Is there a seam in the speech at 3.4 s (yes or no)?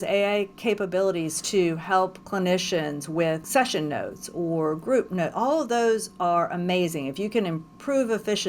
yes